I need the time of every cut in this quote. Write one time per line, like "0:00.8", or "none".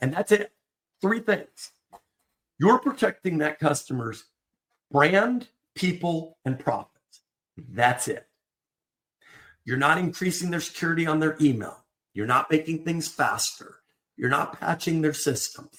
none